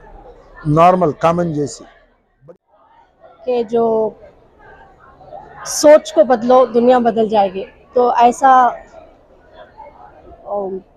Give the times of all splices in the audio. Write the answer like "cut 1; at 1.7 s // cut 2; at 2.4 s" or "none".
cut 1; at 2.4 s